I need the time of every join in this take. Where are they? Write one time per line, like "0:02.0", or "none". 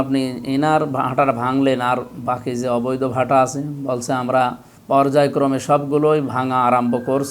0:04.7